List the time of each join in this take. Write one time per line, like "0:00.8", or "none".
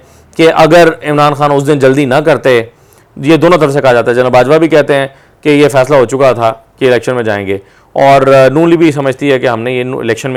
none